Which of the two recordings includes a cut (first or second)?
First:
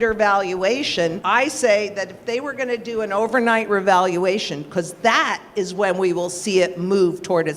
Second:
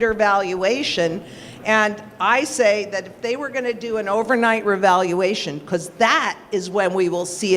first